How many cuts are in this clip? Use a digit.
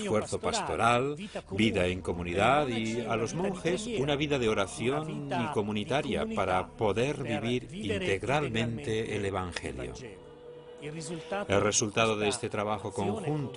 0